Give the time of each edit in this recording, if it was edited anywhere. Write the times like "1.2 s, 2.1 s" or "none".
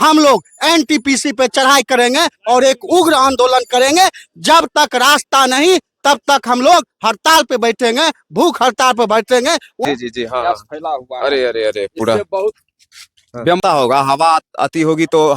9.8 s, 13.6 s